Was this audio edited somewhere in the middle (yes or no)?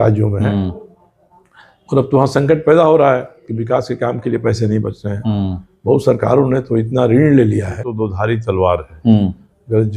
yes